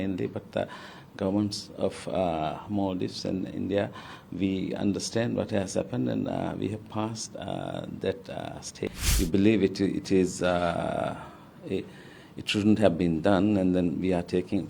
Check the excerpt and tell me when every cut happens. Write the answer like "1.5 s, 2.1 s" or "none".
8.9 s